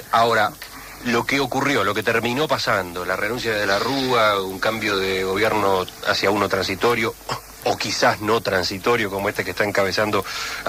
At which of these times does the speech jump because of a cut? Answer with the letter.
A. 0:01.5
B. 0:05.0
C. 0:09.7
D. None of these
D